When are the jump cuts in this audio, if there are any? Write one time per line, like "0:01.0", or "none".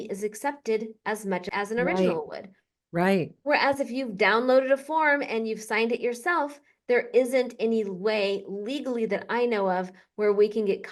0:01.5